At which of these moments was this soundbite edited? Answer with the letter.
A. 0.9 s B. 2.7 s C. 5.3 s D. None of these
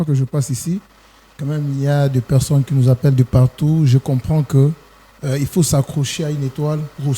D